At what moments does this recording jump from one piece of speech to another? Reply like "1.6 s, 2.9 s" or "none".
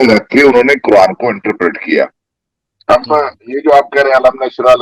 none

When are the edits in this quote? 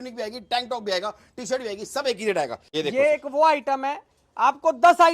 2.6 s

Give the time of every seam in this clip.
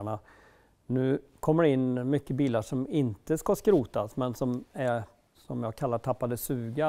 none

